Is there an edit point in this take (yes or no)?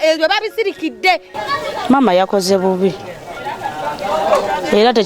yes